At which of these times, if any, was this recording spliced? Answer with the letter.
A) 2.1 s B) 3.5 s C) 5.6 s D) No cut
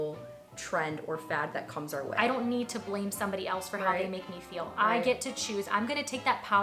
A